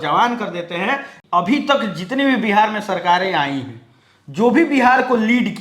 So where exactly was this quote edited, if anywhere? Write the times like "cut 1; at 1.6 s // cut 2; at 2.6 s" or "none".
cut 1; at 1.1 s

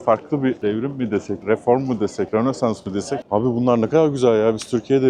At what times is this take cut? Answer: cut 1; at 1.0 s // cut 2; at 2.3 s // cut 3; at 3.2 s

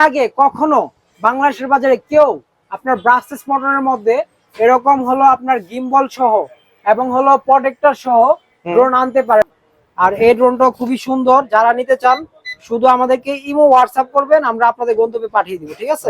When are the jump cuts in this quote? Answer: cut 1; at 9.5 s

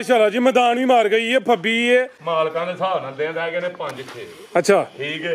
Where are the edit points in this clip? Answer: cut 1; at 2.2 s

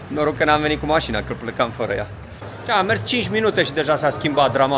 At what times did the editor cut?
cut 1; at 2.5 s

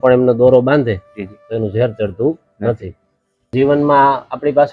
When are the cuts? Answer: cut 1; at 3.5 s

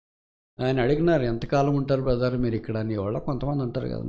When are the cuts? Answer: none

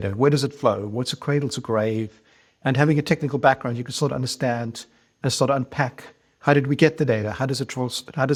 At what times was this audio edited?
none

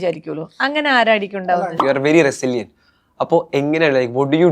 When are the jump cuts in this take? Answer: cut 1; at 1.7 s

